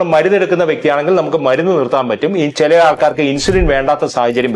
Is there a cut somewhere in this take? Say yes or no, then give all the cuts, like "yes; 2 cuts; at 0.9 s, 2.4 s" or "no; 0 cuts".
no; 0 cuts